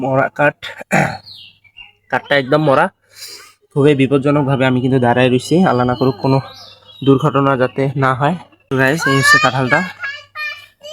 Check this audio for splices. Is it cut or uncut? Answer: cut